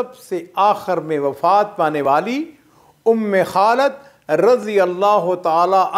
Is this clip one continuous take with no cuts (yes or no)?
yes